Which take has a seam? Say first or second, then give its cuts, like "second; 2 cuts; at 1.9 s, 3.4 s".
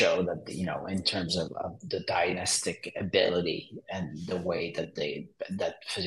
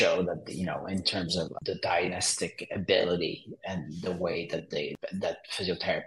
second; 2 cuts; at 1.5 s, 5.0 s